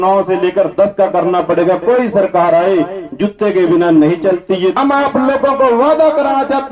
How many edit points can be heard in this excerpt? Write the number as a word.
one